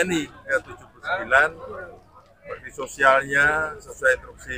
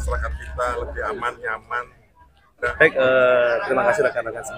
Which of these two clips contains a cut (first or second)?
second